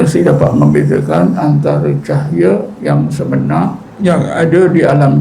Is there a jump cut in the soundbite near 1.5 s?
no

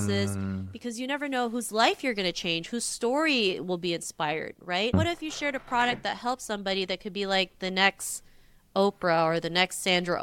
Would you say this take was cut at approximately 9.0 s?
no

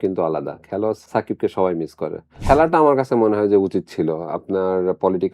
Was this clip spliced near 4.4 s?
no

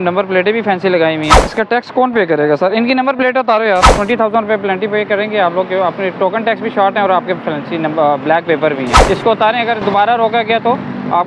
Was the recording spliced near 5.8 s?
no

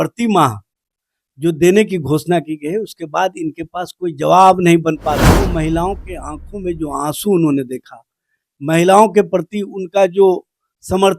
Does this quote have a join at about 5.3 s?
yes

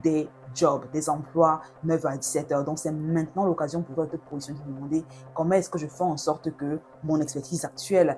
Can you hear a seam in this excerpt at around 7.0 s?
no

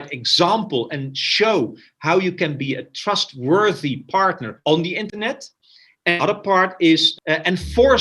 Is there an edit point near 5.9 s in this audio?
no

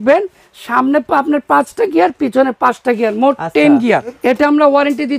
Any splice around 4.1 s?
yes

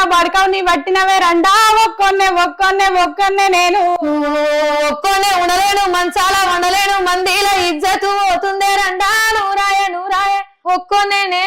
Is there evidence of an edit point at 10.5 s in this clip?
yes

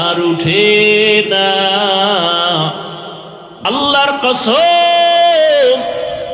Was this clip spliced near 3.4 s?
yes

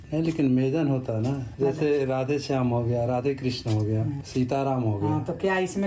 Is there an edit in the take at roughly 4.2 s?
yes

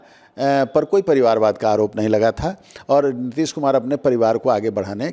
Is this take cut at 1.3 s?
no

